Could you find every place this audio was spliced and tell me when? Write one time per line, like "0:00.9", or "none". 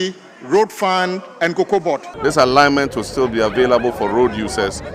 0:02.1